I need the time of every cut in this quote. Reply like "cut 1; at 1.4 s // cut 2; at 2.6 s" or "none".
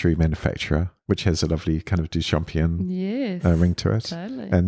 none